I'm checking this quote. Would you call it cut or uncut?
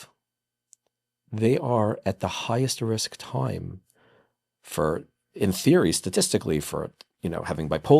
uncut